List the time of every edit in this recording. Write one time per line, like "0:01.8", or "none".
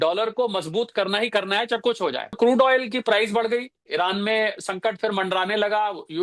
0:02.4